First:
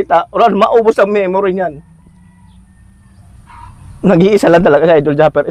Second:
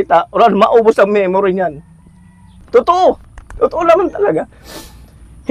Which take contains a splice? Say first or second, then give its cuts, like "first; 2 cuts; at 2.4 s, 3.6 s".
second; 1 cut; at 2.6 s